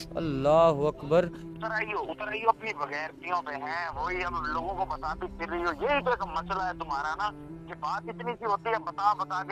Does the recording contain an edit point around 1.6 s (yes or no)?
yes